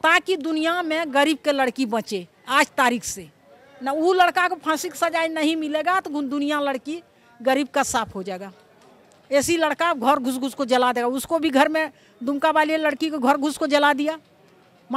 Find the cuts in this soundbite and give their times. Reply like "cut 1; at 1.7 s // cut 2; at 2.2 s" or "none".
none